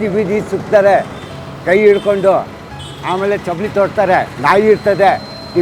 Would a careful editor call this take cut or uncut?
uncut